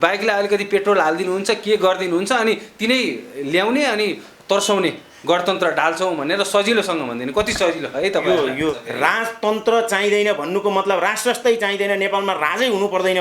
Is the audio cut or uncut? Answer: cut